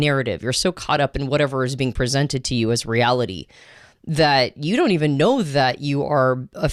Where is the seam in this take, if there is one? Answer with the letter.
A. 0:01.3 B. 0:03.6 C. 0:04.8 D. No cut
D